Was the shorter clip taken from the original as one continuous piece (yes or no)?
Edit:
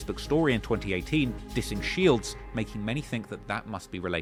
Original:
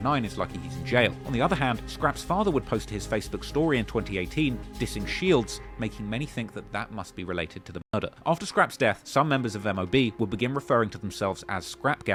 yes